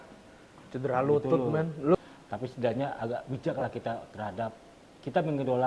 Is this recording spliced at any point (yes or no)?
yes